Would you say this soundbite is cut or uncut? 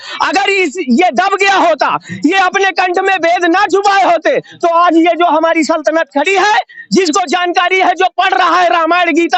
uncut